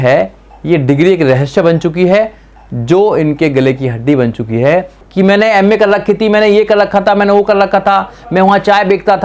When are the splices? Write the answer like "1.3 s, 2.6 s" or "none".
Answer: 5.0 s